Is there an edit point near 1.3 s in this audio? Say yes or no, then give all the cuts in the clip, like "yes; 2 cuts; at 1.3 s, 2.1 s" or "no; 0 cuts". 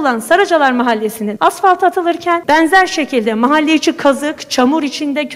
yes; 2 cuts; at 1.3 s, 2.4 s